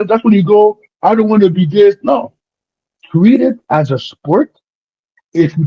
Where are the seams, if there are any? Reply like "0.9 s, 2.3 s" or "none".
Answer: none